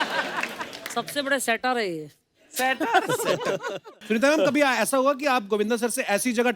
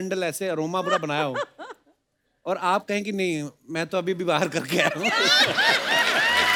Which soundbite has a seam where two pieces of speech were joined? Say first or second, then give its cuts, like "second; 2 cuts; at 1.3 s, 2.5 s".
first; 1 cut; at 3.9 s